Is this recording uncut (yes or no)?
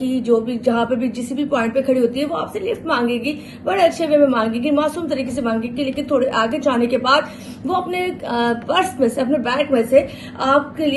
yes